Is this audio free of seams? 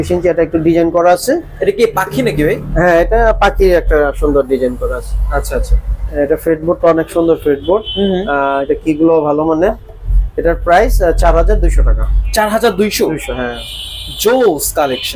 yes; 0 cuts

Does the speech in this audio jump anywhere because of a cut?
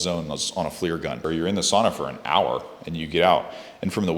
yes; 1 cut; at 1.2 s

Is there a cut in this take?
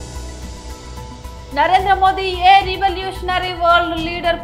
no; 0 cuts

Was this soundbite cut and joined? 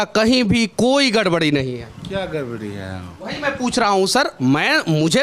yes; 1 cut; at 3.2 s

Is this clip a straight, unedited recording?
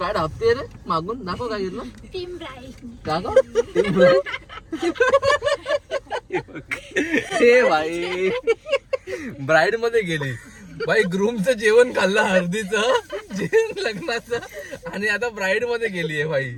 yes; 0 cuts

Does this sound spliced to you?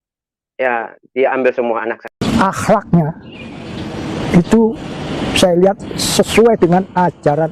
yes; 1 cut; at 2.2 s

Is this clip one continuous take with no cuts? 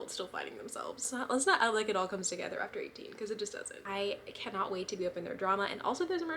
no; 2 cuts; at 1.1 s, 3.7 s

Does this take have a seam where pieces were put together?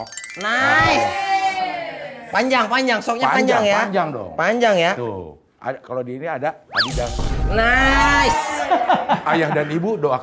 no; 0 cuts

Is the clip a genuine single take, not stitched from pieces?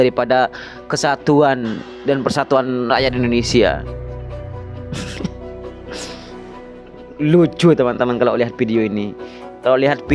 yes; 0 cuts

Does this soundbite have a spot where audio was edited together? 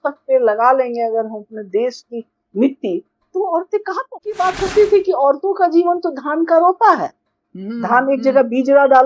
yes; 1 cut; at 4.3 s

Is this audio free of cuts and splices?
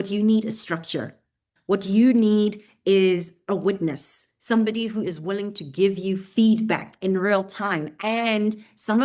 no; 1 cut; at 1.5 s

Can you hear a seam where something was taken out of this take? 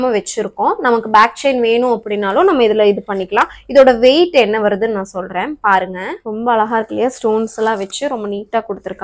yes; 1 cut; at 6.1 s

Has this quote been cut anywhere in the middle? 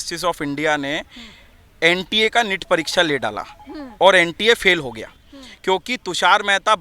no; 0 cuts

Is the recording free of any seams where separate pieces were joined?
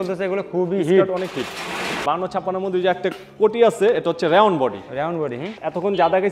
no; 1 cut; at 2.0 s

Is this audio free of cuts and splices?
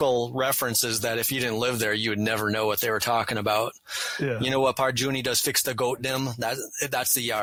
yes; 0 cuts

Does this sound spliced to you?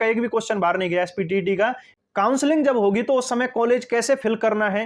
yes; 1 cut; at 1.9 s

